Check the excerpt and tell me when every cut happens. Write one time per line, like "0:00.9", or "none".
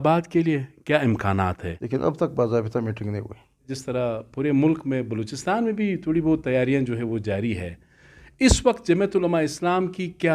0:01.7
0:03.8

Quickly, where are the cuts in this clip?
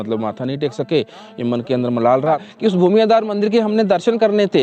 0:02.4

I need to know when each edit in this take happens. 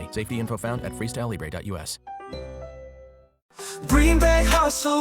0:03.6

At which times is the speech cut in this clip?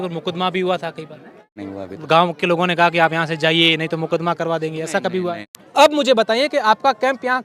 0:01.6
0:05.5

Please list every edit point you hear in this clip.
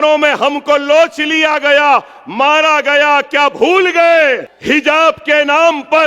0:04.5

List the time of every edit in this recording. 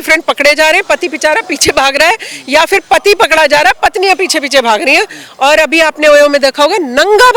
none

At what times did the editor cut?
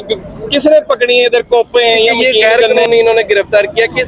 0:02.3

